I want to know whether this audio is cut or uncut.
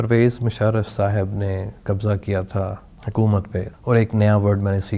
cut